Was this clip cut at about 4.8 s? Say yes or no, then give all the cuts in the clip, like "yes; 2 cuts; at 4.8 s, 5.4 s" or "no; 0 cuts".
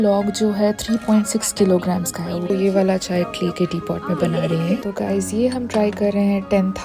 yes; 2 cuts; at 2.5 s, 4.8 s